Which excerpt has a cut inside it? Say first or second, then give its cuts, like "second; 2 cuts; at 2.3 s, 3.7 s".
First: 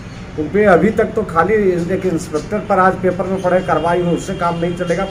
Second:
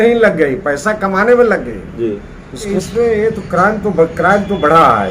second; 1 cut; at 2.7 s